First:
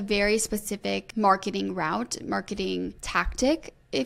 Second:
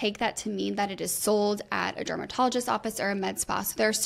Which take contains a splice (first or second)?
first